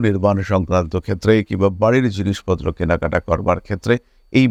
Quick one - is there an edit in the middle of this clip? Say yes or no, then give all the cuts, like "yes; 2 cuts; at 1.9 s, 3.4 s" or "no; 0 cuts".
no; 0 cuts